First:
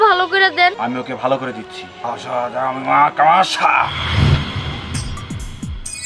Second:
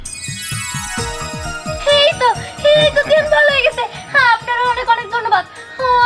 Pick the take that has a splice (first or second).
first